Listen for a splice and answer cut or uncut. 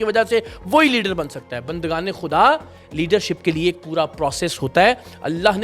uncut